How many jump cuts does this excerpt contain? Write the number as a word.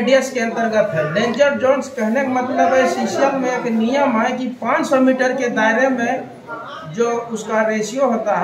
zero